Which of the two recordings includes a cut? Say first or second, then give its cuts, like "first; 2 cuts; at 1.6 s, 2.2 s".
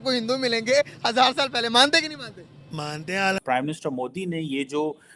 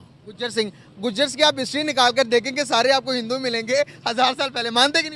first; 1 cut; at 3.4 s